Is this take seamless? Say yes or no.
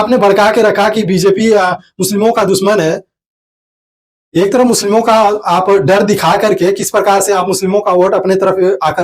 yes